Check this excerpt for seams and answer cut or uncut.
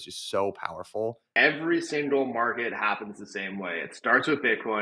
cut